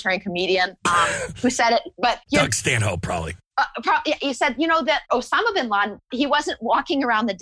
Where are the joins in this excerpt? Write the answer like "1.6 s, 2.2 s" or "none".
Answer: 2.2 s, 3.4 s, 5.1 s, 6.1 s